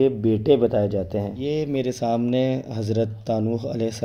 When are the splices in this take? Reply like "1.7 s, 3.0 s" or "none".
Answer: 1.3 s